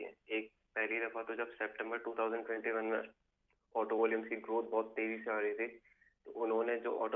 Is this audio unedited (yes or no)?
yes